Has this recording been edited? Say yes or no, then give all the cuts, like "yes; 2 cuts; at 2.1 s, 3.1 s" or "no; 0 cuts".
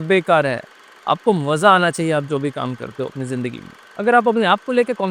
yes; 1 cut; at 3.8 s